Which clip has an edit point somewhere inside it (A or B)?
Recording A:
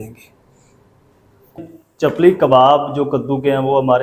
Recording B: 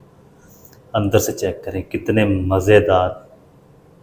A